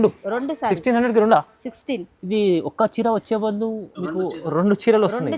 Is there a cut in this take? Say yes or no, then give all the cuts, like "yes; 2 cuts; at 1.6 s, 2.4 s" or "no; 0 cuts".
no; 0 cuts